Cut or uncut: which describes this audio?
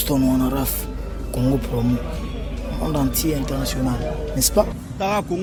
uncut